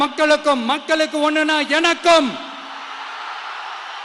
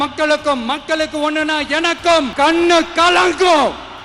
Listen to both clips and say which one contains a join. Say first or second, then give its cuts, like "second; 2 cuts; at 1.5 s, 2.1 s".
second; 1 cut; at 2.3 s